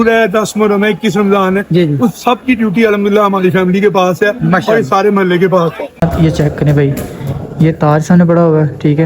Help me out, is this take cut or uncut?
cut